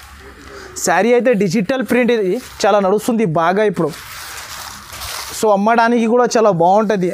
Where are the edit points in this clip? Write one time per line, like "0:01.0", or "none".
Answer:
none